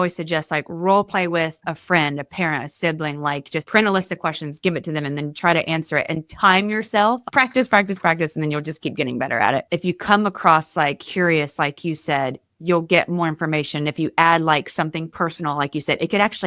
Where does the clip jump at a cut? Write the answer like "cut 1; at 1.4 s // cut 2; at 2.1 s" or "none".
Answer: cut 1; at 7.2 s // cut 2; at 9.7 s

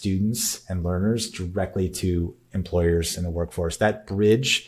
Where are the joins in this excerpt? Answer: none

